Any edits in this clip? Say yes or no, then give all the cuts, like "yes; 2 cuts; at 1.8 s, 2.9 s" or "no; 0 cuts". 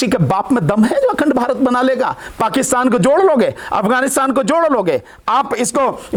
no; 0 cuts